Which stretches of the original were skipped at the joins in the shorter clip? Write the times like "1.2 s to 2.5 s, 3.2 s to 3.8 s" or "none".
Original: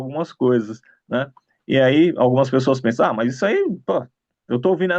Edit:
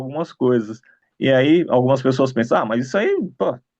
0.9 s to 1.4 s